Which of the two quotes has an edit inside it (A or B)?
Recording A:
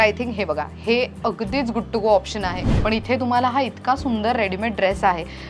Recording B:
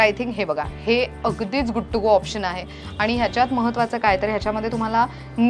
A